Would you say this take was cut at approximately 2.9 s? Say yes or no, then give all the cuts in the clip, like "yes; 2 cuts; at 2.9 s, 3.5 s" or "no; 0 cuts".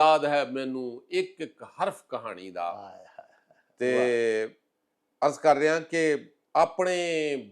no; 0 cuts